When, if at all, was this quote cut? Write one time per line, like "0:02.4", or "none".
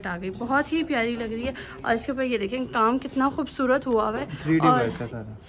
none